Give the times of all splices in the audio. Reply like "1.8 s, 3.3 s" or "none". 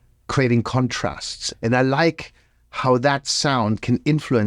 1.4 s